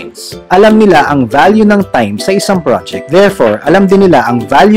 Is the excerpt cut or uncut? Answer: uncut